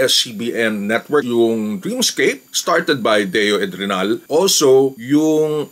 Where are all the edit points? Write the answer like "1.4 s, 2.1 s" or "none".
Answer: 1.2 s, 2.5 s, 4.3 s